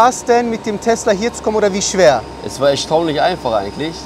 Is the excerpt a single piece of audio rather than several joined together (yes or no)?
yes